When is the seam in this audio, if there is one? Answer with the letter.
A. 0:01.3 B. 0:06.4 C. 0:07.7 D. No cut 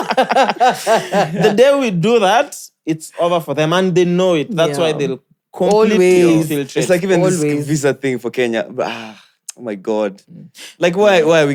D